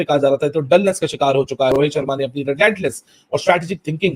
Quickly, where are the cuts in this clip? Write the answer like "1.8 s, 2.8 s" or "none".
1.7 s